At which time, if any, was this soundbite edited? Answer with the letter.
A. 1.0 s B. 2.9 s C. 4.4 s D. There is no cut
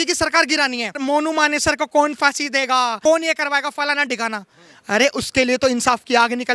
A